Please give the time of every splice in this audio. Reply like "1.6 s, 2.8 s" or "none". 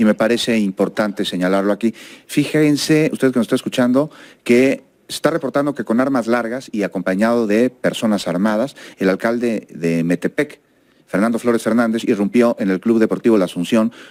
none